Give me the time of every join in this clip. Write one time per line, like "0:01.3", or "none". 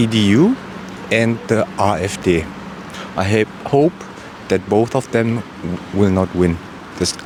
none